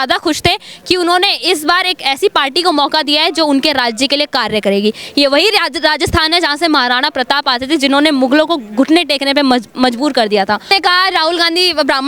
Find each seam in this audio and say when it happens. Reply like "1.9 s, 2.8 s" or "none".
10.6 s